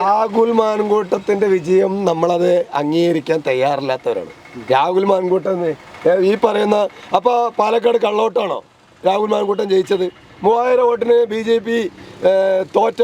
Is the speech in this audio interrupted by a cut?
no; 0 cuts

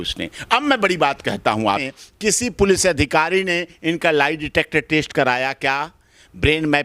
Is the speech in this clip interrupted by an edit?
yes; 1 cut; at 1.8 s

